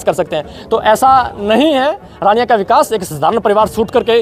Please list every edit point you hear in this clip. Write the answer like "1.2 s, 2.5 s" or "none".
none